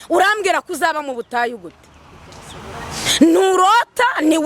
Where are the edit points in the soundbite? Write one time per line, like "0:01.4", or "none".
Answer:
none